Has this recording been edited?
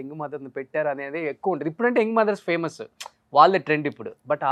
no; 0 cuts

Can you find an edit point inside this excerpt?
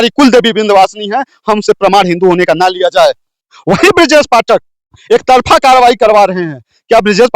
yes; 1 cut; at 3.4 s

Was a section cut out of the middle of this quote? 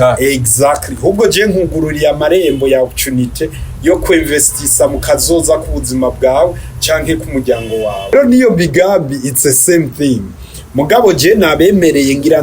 yes; 1 cut; at 8.1 s

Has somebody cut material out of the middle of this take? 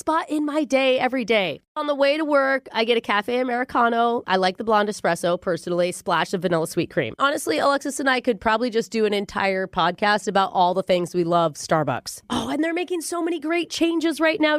yes; 2 cuts; at 1.7 s, 7.1 s

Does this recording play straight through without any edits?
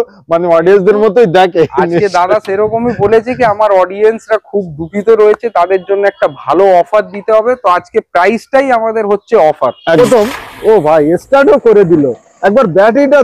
no; 1 cut; at 10.0 s

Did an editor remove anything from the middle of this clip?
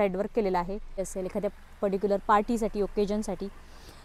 yes; 1 cut; at 1.0 s

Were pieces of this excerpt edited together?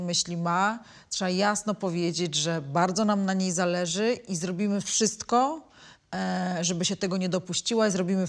no; 0 cuts

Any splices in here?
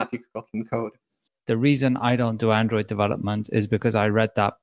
yes; 1 cut; at 1.3 s

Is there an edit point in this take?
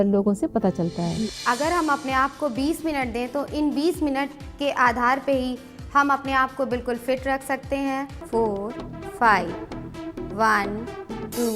yes; 2 cuts; at 1.1 s, 8.2 s

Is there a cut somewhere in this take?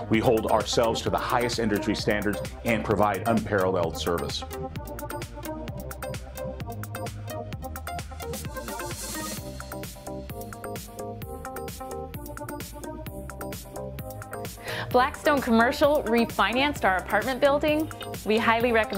yes; 1 cut; at 14.9 s

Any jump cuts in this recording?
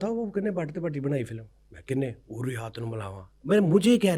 no; 0 cuts

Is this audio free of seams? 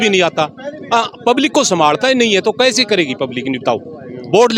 yes; 0 cuts

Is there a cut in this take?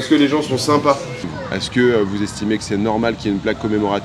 yes; 1 cut; at 1.2 s

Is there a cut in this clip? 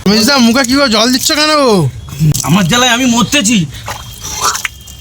yes; 1 cut; at 2.4 s

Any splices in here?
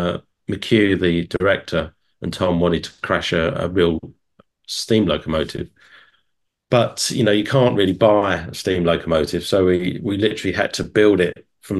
no; 0 cuts

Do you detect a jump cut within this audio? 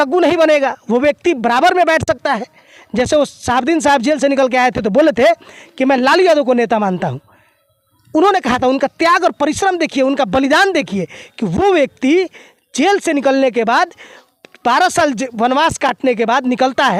no; 0 cuts

